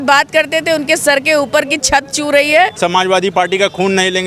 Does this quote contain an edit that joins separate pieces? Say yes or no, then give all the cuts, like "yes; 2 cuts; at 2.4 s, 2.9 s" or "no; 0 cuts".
yes; 1 cut; at 2.7 s